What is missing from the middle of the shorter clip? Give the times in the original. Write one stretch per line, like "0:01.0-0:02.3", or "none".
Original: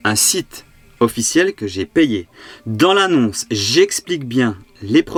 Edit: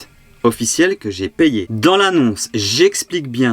0:02.2-0:02.6